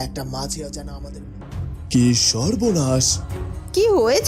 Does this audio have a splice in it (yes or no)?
yes